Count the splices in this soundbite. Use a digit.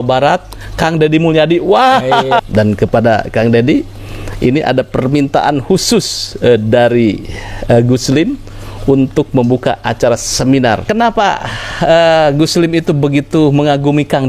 2